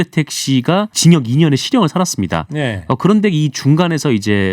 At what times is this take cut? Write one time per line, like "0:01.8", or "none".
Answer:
0:00.9